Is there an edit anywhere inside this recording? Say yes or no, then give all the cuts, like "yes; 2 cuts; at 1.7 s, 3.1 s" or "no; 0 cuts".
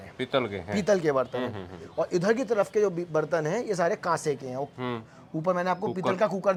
no; 0 cuts